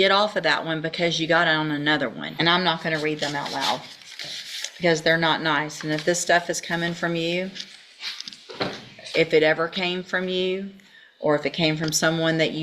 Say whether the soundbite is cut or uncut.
cut